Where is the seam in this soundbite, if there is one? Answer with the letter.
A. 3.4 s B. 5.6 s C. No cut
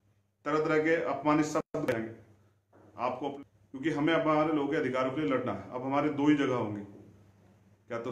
A